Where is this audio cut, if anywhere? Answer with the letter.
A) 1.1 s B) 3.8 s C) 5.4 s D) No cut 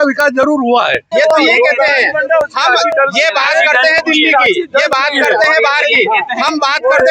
A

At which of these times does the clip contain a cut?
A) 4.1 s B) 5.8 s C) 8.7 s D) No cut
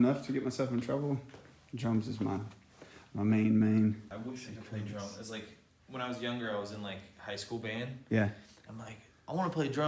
A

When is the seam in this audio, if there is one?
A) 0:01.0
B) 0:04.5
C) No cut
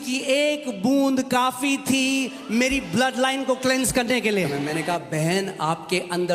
B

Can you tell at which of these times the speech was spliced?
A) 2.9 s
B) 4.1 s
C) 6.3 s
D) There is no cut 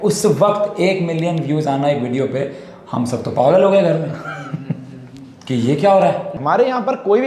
C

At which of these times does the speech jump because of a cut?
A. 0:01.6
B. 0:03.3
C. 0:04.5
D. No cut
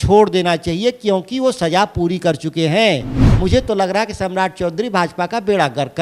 B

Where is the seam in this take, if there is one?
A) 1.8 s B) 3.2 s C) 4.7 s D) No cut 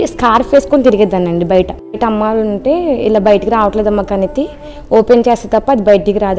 A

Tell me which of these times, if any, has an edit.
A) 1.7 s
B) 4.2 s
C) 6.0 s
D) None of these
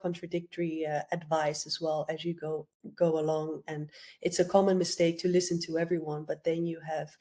D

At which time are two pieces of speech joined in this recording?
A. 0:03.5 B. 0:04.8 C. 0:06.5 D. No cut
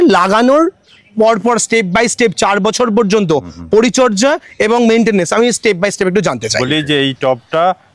C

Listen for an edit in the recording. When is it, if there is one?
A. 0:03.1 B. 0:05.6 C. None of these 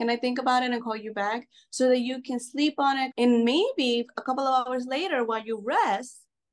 A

